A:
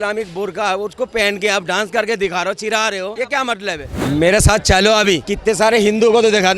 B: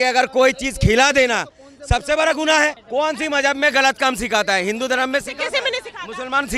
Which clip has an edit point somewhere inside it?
A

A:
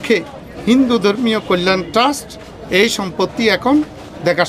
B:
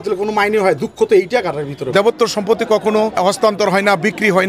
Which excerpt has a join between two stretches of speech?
B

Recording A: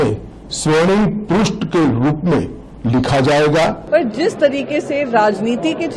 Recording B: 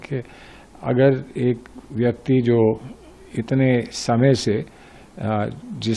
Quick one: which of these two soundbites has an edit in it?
A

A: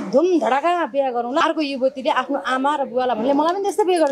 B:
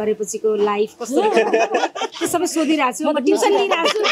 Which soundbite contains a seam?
A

